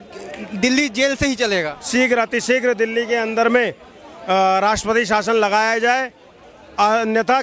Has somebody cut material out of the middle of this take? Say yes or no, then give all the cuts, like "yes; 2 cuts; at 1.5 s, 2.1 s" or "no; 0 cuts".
yes; 1 cut; at 1.8 s